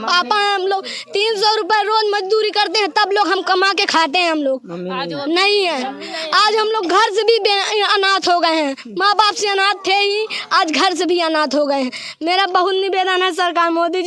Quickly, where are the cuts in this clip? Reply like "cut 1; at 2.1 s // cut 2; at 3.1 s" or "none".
none